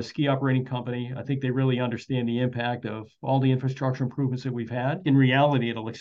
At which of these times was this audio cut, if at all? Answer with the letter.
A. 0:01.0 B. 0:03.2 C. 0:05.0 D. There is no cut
C